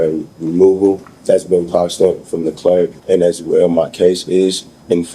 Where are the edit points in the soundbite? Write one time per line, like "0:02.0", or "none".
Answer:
0:01.1
0:03.0

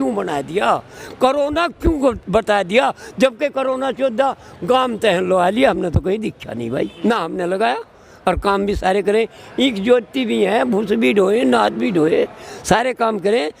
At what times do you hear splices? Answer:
0:06.9

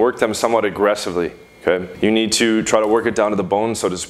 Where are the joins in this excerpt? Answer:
0:01.9

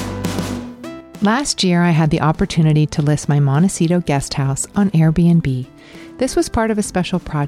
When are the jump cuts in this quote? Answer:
0:01.1

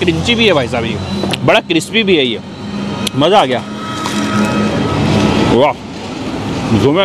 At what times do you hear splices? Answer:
none

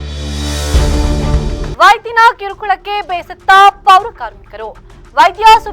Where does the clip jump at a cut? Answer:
0:01.7

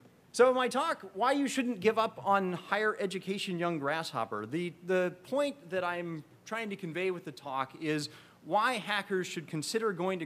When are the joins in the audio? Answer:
0:01.4

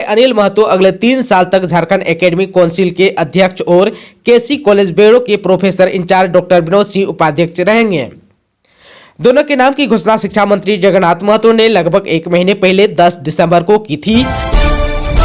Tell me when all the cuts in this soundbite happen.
0:14.3

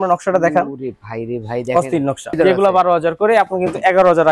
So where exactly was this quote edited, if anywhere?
0:02.4

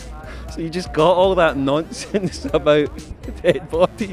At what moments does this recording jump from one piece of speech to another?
none

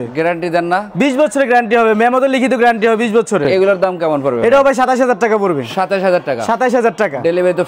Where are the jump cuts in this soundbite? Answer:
none

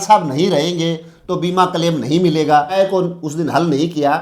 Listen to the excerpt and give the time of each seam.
0:02.8

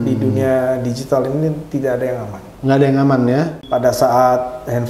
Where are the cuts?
0:03.6

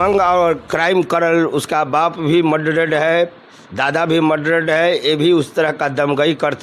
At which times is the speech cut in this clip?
none

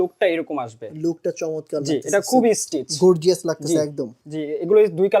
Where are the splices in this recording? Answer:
0:04.2

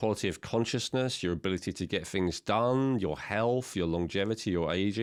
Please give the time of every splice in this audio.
none

